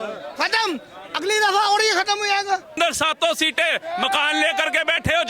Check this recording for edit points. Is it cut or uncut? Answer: cut